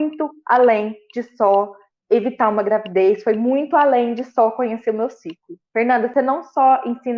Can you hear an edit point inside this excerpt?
yes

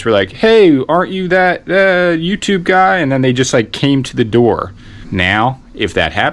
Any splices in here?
yes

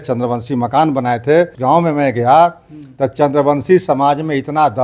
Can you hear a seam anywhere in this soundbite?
yes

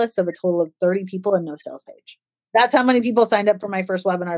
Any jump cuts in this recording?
yes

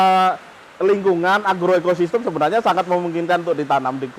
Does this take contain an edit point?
no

